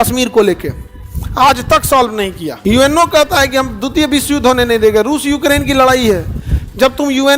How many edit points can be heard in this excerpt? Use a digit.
1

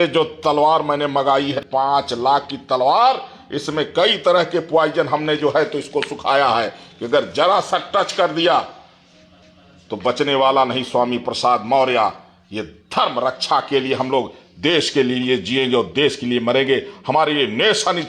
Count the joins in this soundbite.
1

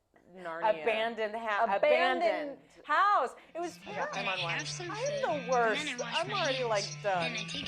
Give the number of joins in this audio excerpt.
1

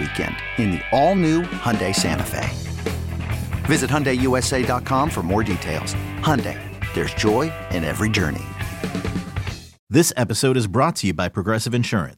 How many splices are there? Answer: 1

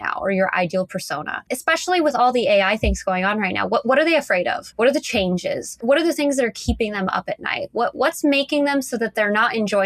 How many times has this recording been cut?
3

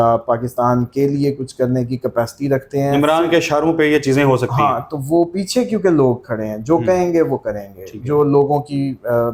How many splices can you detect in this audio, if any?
0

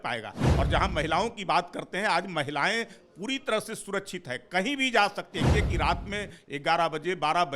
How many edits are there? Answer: 1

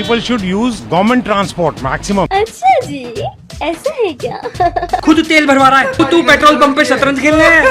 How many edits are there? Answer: 3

